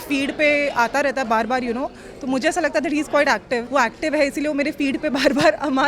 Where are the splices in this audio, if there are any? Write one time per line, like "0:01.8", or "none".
0:03.7